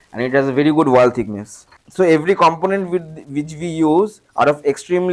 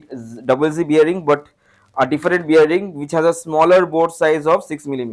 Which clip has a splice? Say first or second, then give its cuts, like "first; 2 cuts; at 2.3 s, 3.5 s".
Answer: first; 2 cuts; at 1.8 s, 4.2 s